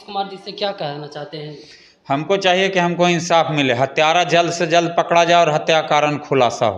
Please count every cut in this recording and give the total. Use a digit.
0